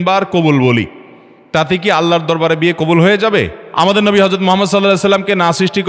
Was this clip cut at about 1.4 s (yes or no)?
no